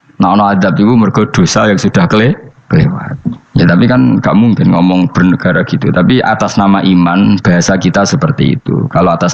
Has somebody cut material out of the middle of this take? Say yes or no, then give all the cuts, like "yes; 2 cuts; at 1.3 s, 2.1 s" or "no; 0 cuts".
no; 0 cuts